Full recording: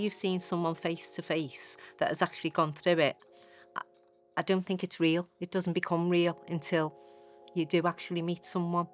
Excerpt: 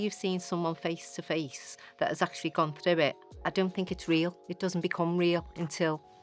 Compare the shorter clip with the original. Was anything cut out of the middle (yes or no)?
yes